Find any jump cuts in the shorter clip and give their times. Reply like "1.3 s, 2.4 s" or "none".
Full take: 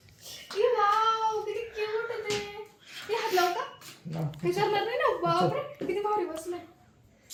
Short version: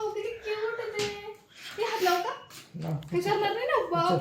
none